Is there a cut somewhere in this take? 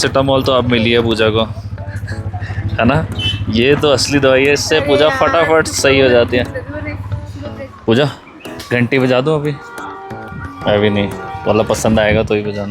yes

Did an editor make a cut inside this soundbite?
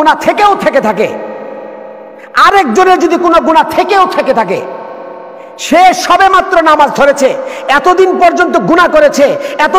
no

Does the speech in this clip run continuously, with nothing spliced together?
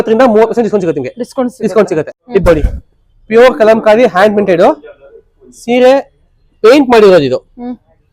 no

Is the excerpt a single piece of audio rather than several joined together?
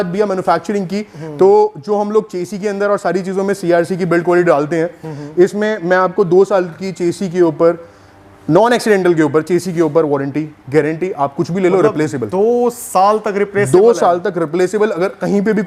yes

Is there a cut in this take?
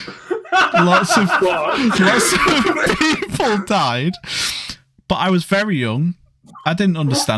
no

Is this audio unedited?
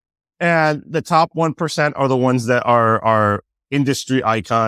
yes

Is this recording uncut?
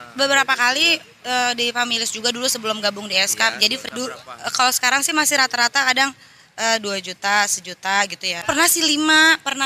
no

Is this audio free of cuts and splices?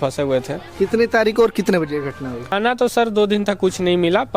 no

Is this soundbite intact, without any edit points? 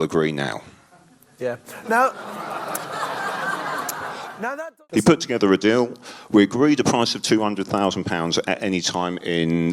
no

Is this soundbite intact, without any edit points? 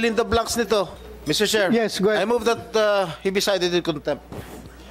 no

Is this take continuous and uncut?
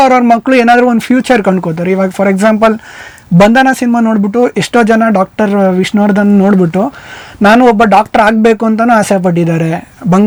yes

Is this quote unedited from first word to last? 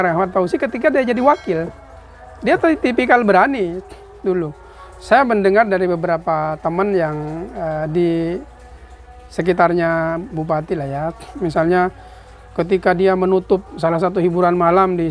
yes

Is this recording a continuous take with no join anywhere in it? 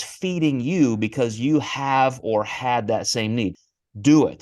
no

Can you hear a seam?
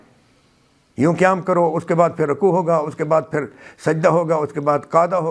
no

